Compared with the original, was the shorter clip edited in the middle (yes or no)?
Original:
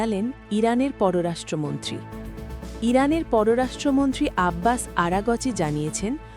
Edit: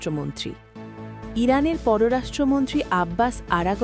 no